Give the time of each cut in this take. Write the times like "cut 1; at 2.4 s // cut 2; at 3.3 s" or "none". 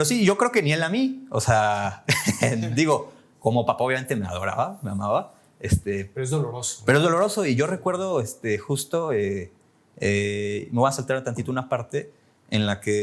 none

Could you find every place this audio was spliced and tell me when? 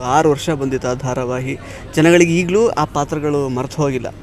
none

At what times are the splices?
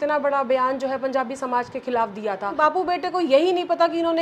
cut 1; at 2.5 s

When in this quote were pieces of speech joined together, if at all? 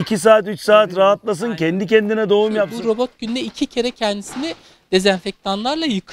cut 1; at 2.8 s

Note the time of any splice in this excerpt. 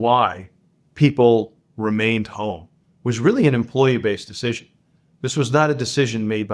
none

